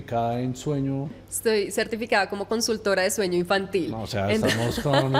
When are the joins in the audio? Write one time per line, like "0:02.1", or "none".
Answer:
0:01.3